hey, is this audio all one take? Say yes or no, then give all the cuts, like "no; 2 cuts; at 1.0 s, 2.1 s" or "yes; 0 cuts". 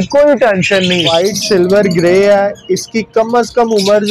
no; 1 cut; at 1.1 s